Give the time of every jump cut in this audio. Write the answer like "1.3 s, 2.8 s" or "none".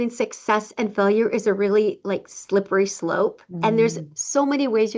none